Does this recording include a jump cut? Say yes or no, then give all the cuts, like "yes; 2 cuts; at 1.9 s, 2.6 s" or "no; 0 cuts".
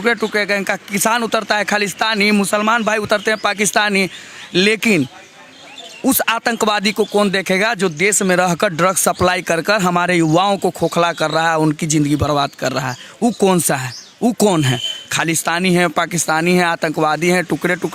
no; 0 cuts